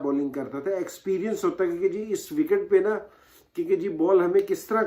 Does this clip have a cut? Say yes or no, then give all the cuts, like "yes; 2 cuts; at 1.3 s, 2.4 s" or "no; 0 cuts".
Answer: no; 0 cuts